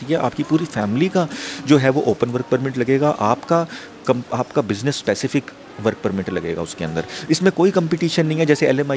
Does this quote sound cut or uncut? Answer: uncut